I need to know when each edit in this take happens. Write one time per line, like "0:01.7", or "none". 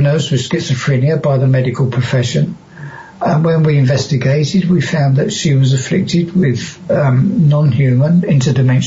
none